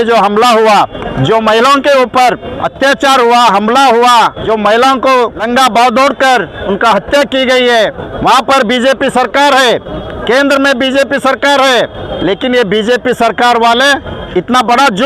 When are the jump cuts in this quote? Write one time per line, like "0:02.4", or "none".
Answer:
0:01.0
0:02.6
0:04.4
0:05.4
0:06.6
0:08.0
0:10.1
0:12.1
0:14.2

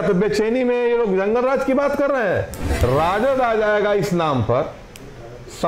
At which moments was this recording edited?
0:02.6

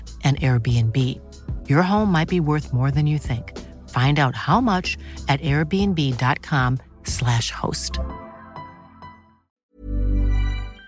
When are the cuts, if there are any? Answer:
0:09.5

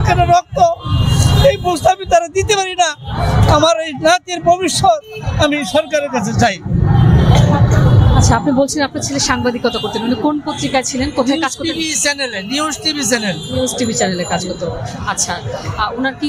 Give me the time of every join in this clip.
none

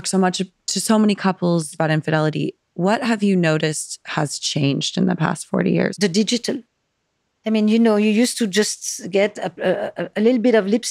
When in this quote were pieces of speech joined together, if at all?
0:01.7
0:06.0

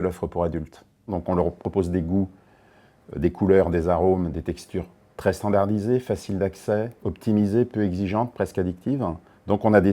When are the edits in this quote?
0:01.0

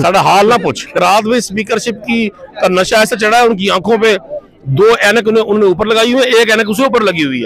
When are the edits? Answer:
0:00.9

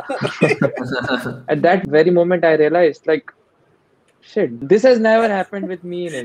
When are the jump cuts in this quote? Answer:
0:01.9
0:04.5

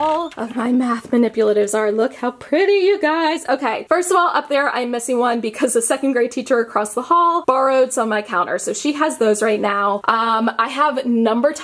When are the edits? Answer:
none

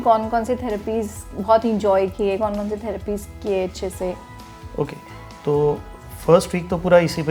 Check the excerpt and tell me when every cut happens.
none

